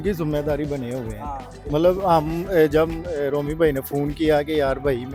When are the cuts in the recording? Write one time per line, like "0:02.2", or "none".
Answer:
none

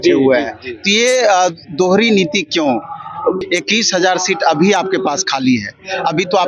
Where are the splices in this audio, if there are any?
0:03.4

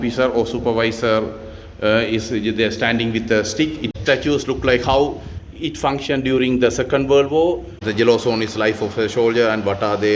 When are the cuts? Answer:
0:03.9
0:07.9

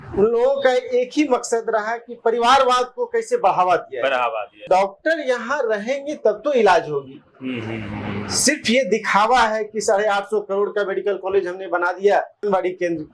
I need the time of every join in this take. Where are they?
0:04.6
0:12.4

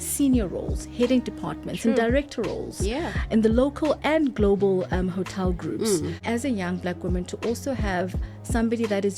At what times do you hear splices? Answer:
0:06.2

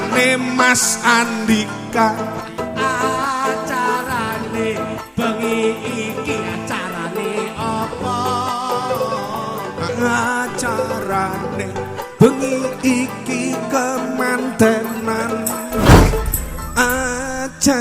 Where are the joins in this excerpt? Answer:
0:02.6

